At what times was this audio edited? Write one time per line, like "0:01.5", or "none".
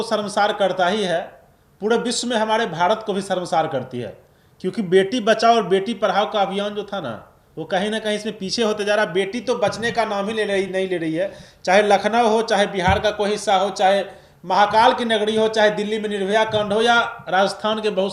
none